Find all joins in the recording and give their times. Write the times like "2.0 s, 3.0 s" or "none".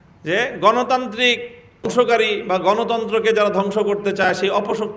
1.9 s